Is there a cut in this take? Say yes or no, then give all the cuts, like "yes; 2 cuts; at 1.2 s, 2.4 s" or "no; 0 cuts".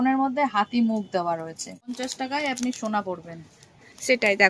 yes; 1 cut; at 1.9 s